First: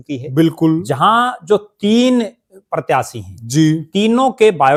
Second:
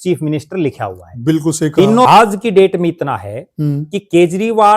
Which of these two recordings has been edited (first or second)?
second